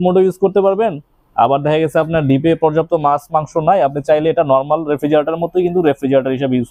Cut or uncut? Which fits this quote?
uncut